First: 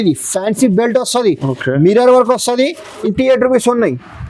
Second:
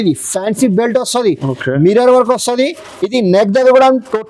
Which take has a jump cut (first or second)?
first